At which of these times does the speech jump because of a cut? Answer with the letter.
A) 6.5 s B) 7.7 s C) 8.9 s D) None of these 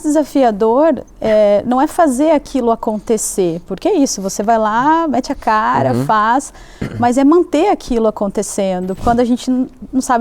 C